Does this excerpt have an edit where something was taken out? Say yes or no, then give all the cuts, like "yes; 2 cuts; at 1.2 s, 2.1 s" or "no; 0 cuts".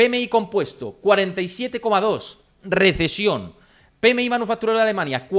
no; 0 cuts